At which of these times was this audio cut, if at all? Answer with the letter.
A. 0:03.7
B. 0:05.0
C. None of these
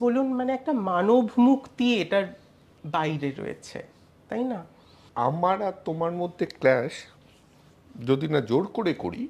B